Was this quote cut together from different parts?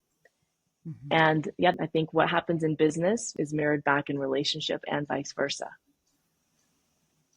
yes; 2 cuts; at 1.7 s, 3.3 s

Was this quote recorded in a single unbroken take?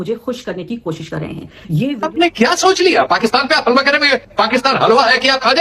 no; 1 cut; at 2.0 s

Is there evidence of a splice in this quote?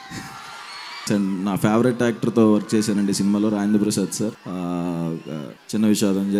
yes; 3 cuts; at 1.1 s, 4.4 s, 5.5 s

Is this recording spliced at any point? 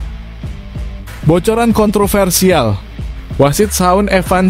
yes; 1 cut; at 1.2 s

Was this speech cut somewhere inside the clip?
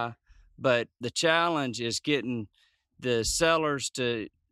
yes; 1 cut; at 1.0 s

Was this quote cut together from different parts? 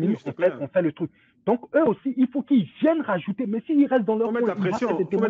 no; 0 cuts

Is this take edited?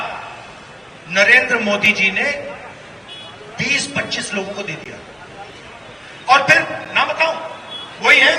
no; 0 cuts

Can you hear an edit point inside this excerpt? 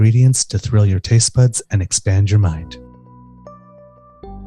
yes; 1 cut; at 2.6 s

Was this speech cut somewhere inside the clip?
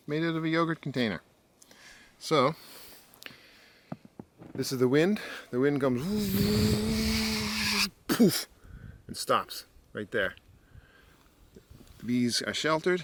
no; 0 cuts

